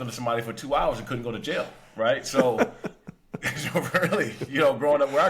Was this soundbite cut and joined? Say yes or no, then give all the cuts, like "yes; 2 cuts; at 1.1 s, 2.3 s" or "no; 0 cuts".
no; 0 cuts